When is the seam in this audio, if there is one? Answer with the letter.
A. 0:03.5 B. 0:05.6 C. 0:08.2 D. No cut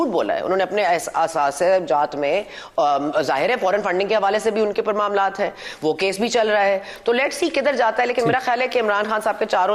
D